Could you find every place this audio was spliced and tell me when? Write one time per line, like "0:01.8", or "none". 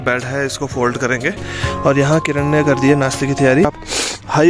0:01.6
0:03.7